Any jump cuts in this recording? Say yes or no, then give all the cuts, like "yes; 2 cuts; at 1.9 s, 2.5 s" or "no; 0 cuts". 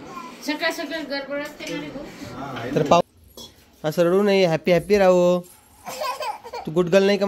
yes; 1 cut; at 3.0 s